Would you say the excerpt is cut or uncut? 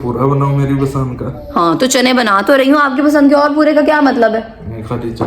cut